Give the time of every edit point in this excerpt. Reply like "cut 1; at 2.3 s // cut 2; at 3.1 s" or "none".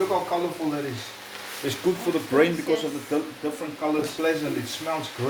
cut 1; at 4.1 s